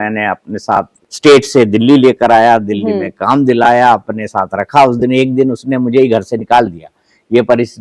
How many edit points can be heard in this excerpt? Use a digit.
1